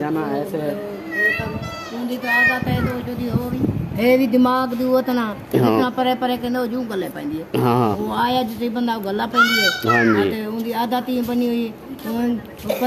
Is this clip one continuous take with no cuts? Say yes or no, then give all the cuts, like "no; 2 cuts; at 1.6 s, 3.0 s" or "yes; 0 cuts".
yes; 0 cuts